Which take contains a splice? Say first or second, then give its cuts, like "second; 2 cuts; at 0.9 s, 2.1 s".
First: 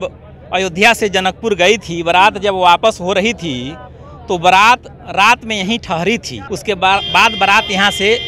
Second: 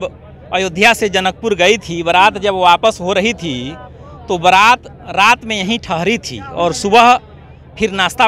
first; 1 cut; at 6.4 s